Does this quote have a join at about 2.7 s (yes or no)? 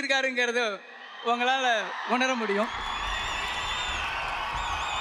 no